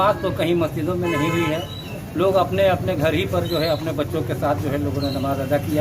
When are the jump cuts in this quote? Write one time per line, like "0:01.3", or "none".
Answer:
none